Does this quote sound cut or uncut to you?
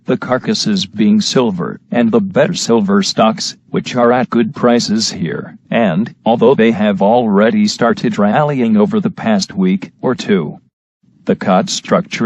cut